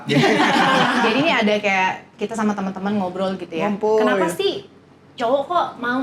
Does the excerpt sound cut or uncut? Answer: cut